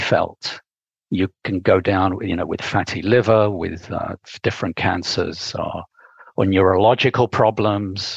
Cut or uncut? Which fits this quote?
uncut